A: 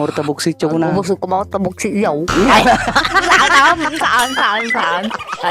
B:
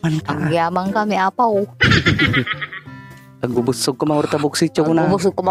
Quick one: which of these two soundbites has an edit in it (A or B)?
A